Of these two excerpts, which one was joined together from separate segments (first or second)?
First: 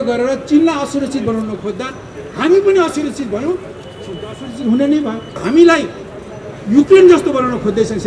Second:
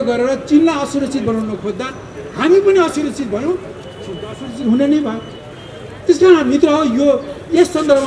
first